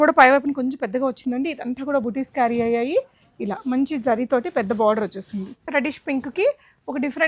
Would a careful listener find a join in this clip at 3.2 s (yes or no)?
no